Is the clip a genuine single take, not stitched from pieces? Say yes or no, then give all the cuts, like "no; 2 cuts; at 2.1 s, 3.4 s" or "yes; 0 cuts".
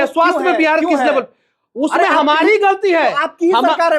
yes; 0 cuts